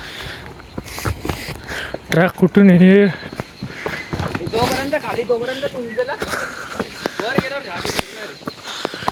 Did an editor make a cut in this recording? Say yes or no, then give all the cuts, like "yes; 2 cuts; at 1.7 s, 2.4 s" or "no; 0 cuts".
no; 0 cuts